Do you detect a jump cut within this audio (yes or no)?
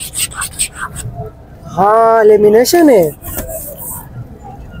no